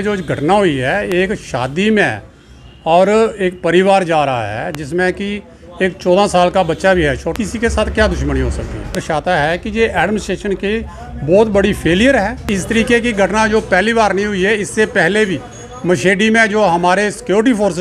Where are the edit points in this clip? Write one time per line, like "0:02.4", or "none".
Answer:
0:07.3
0:09.0
0:12.5